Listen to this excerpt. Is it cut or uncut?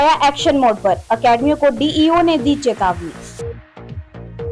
uncut